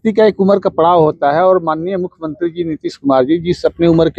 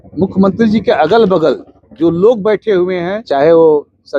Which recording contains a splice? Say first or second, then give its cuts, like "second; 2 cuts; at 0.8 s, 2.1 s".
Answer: second; 1 cut; at 3.2 s